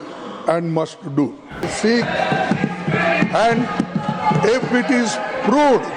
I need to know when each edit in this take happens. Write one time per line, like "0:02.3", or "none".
0:01.7